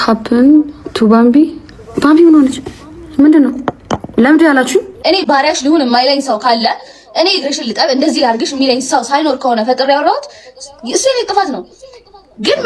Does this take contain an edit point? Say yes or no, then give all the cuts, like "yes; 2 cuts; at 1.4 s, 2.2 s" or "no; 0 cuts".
no; 0 cuts